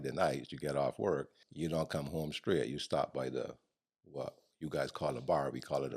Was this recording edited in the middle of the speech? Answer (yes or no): yes